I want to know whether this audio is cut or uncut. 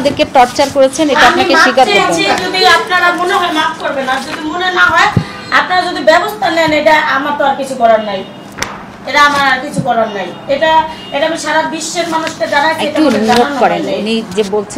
uncut